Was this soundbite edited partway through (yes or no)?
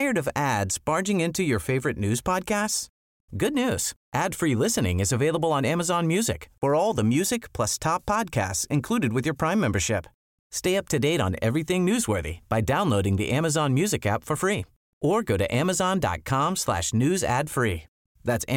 no